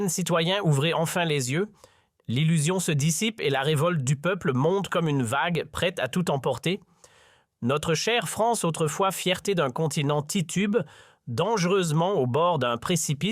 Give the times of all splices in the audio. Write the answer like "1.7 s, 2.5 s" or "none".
0.9 s